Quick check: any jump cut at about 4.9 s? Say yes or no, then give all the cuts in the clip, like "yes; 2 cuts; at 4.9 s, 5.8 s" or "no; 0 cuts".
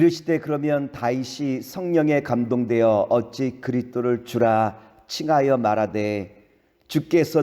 no; 1 cut; at 6.5 s